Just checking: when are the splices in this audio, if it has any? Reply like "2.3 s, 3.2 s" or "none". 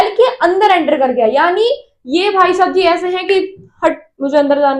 none